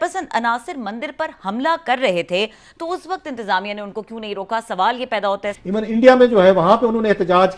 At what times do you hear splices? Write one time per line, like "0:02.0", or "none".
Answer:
0:05.5

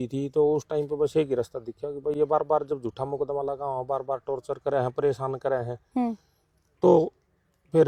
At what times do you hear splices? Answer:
none

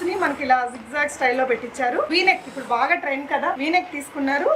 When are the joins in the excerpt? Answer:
none

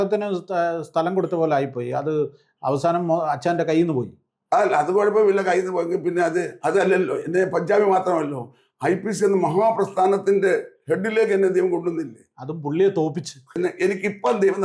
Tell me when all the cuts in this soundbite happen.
0:13.5

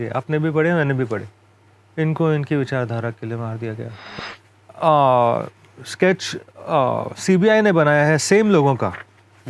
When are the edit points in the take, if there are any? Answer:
0:04.2

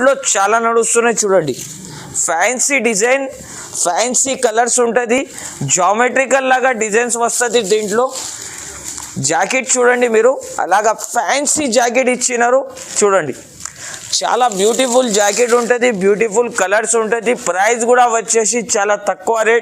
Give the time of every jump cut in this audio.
none

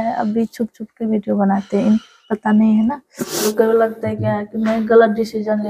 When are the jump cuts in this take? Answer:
0:03.5

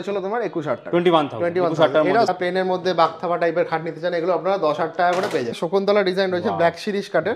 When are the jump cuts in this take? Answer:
0:02.3
0:05.6

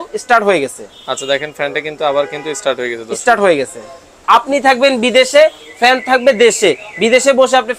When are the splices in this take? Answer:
0:04.2

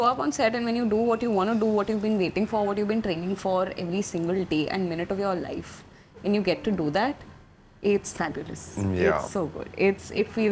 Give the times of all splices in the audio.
none

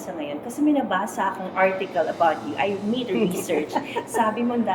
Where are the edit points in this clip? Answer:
none

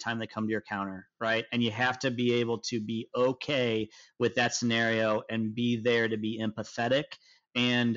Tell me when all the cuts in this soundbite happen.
none

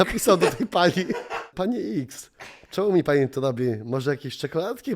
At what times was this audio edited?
0:01.4

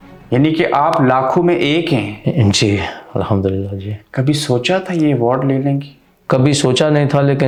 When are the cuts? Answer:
none

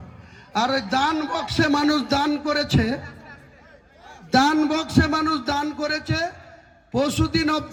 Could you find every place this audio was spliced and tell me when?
none

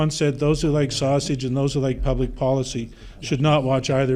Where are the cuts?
none

